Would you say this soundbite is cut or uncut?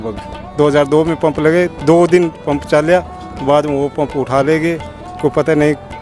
uncut